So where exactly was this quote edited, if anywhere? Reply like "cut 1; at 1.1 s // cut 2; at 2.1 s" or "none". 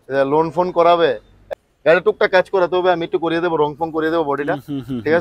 cut 1; at 1.5 s